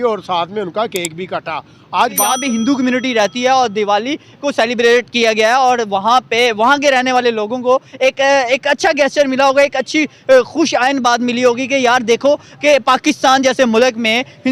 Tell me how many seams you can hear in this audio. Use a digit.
1